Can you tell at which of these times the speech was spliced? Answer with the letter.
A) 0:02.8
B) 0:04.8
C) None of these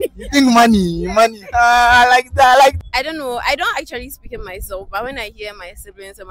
A